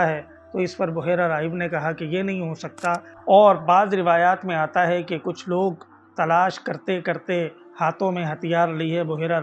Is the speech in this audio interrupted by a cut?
yes; 1 cut; at 3.1 s

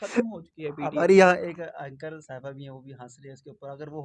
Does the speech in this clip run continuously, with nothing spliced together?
yes; 0 cuts

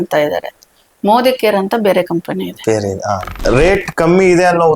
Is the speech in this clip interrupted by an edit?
yes; 1 cut; at 3.2 s

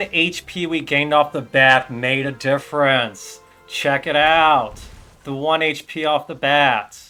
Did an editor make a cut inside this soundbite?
no; 0 cuts

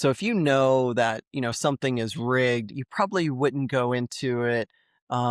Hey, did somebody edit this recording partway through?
no; 0 cuts

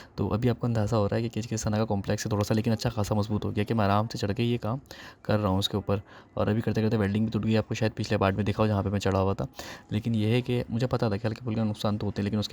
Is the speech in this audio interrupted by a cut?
no; 0 cuts

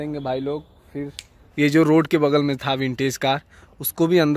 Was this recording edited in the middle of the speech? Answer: yes; 1 cut; at 1.5 s

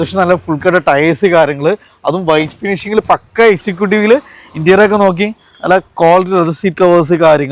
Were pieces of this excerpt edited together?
no; 0 cuts

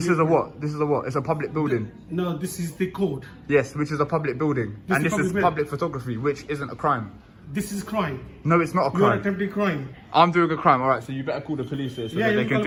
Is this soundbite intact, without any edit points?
yes; 0 cuts

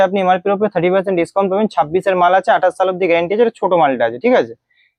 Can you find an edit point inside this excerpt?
no; 0 cuts

